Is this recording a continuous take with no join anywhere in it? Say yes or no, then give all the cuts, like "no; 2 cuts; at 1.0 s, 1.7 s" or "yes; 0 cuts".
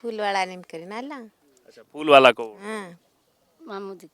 no; 1 cut; at 3.0 s